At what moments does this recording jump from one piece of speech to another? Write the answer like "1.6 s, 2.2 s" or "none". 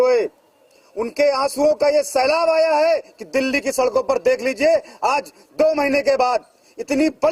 none